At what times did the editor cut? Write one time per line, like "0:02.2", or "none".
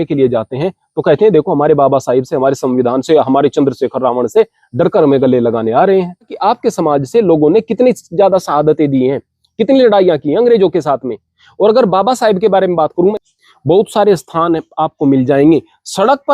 0:06.3
0:13.1

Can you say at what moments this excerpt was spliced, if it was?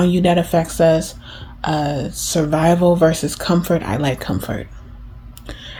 none

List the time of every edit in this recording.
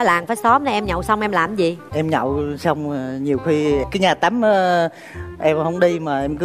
none

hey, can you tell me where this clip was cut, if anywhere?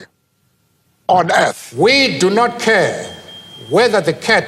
0:01.6

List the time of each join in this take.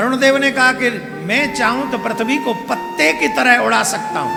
none

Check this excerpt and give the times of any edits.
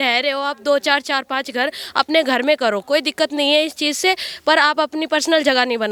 none

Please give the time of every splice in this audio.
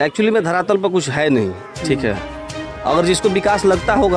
none

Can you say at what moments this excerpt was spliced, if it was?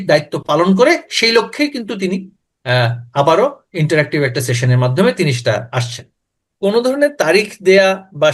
0:06.4

